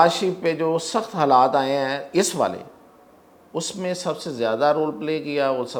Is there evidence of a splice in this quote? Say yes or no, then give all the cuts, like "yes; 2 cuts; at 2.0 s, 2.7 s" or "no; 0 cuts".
no; 0 cuts